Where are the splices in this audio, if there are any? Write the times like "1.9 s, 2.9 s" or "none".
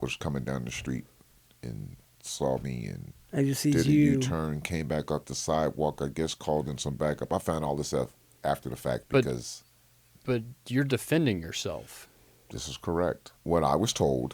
13.3 s